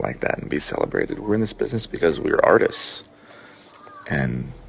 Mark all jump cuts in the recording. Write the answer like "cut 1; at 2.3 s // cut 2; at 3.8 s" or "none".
none